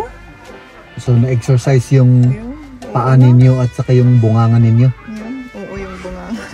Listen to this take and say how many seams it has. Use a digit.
0